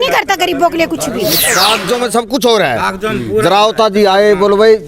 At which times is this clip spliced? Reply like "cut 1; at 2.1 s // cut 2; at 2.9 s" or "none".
cut 1; at 1.4 s